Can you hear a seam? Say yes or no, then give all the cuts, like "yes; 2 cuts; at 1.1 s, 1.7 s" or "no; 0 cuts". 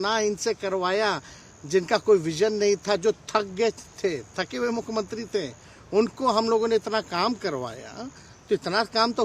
no; 0 cuts